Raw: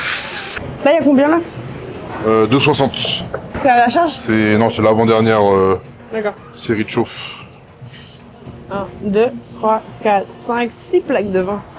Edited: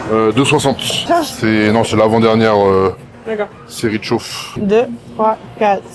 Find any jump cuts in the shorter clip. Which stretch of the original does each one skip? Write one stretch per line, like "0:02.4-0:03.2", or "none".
0:03.2-0:03.9
0:07.4-0:08.9

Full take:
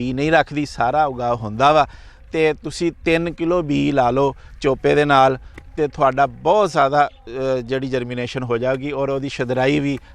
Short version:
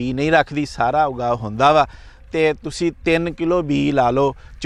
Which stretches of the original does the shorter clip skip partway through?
none

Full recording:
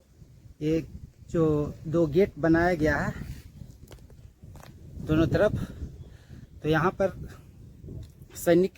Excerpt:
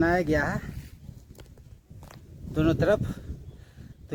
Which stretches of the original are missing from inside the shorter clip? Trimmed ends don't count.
none

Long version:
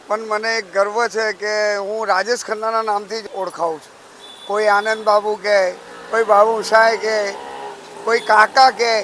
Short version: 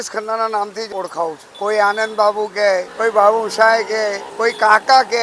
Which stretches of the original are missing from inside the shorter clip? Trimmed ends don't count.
0:03.3-0:03.8
0:05.8-0:06.0
0:07.4-0:07.9

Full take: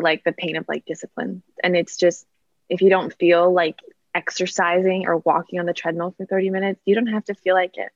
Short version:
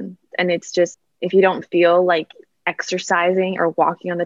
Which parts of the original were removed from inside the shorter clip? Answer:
0:02.3-0:02.5

